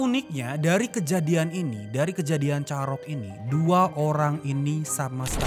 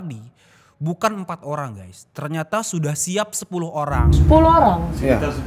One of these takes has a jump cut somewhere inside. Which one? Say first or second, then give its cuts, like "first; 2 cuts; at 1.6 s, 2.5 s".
second; 1 cut; at 4.0 s